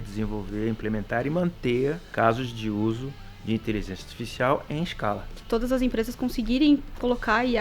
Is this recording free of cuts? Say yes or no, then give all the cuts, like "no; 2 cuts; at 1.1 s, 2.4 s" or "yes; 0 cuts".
no; 2 cuts; at 2.0 s, 5.4 s